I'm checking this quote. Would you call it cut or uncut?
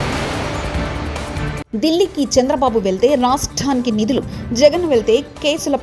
cut